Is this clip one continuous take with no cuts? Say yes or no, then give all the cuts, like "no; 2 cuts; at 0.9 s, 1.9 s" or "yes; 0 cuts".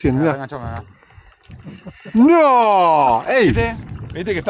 yes; 0 cuts